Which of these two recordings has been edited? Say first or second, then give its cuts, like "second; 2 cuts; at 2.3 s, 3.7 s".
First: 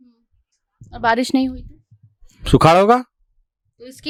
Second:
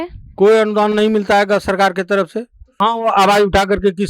second; 1 cut; at 2.8 s